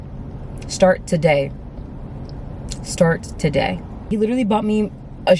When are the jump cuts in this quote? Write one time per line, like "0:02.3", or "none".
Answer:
0:04.0